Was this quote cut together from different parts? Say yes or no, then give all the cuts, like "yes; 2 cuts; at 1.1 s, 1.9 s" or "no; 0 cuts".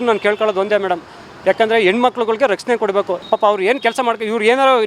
yes; 1 cut; at 3.2 s